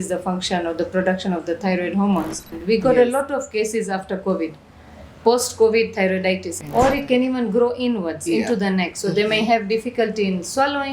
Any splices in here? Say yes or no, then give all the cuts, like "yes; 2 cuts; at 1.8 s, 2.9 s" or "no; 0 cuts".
yes; 2 cuts; at 2.6 s, 6.5 s